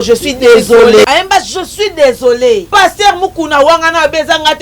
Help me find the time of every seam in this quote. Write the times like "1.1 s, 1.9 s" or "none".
2.7 s